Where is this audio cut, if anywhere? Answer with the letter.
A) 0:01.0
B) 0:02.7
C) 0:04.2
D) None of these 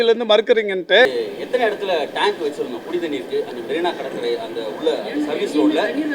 A